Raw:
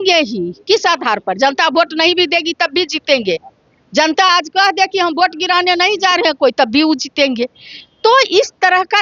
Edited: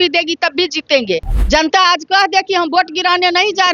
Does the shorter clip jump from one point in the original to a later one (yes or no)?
yes